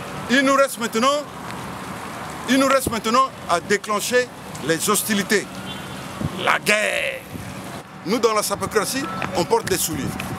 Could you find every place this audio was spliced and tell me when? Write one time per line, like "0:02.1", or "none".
0:07.9